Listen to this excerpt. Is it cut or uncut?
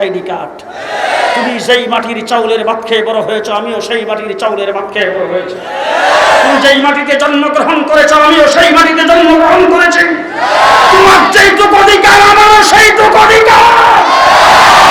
uncut